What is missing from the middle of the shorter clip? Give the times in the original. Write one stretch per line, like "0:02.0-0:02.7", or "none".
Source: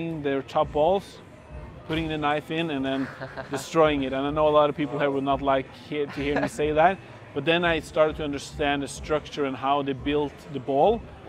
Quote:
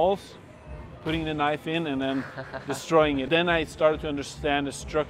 0:04.1-0:07.4